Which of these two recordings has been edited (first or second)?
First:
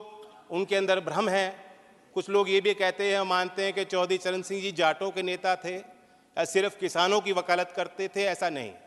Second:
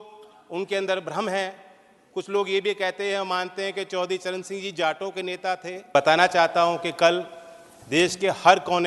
second